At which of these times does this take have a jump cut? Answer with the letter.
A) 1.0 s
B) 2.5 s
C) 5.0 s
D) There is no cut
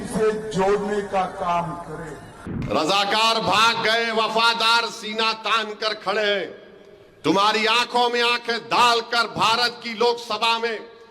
B